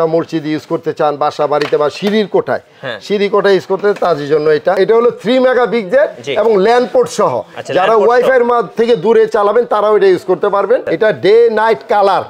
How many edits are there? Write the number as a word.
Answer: two